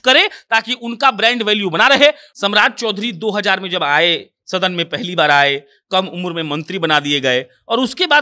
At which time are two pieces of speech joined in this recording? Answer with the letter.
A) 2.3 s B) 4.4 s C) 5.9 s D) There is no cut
A